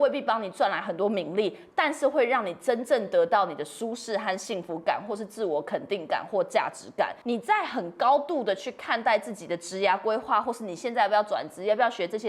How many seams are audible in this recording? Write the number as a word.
one